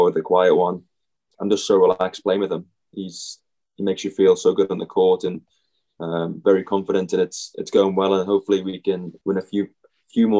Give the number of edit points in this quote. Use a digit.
1